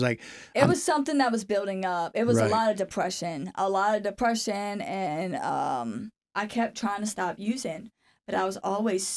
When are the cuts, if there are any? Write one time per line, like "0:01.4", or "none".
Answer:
0:06.2